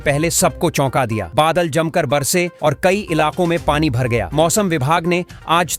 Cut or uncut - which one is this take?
uncut